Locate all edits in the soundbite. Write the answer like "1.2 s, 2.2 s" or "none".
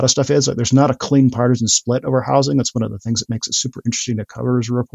none